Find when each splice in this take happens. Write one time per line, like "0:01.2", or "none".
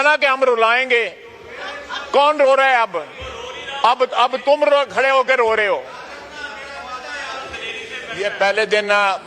0:08.1